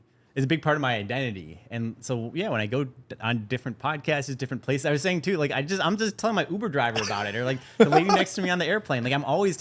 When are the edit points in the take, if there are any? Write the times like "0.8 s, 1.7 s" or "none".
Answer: none